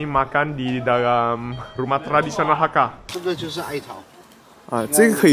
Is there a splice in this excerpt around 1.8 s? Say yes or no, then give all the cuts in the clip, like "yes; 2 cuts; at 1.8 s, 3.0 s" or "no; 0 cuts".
no; 1 cut; at 3.0 s